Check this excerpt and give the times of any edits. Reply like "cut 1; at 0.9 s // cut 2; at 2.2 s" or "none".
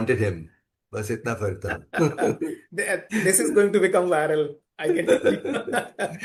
none